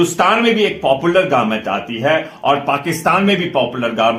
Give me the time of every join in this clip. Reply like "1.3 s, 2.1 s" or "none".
none